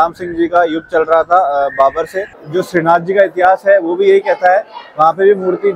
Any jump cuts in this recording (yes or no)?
yes